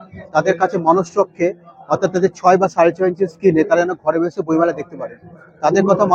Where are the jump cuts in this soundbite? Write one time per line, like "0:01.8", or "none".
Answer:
none

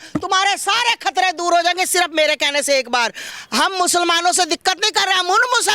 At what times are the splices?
0:03.2

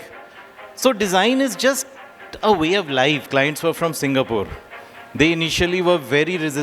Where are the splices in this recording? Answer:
0:03.3

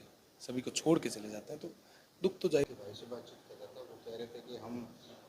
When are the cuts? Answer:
0:02.7

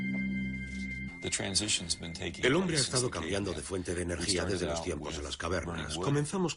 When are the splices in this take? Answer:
0:04.4

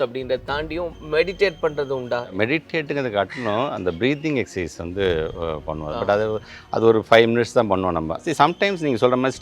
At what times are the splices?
0:02.3
0:08.2

